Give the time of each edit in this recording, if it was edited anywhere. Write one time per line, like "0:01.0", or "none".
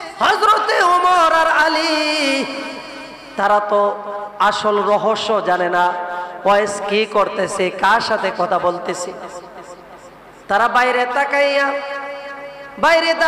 none

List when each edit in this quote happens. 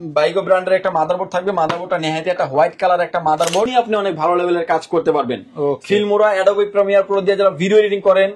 0:03.7

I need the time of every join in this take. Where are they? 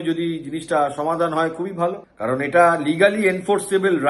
0:02.1

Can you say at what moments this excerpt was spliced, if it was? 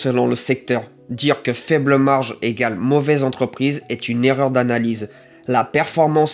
0:05.3

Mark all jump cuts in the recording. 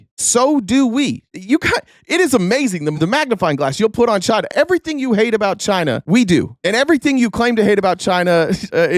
0:04.5

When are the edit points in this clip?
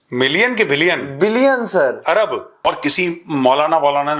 0:02.7

